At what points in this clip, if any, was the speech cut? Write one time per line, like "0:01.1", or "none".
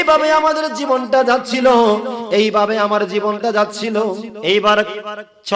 0:04.3